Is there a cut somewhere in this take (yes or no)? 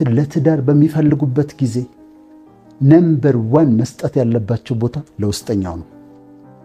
no